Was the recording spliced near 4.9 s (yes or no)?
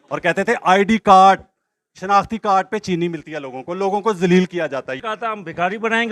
yes